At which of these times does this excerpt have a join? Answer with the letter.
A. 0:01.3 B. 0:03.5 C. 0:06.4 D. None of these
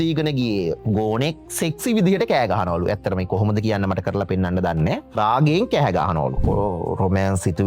C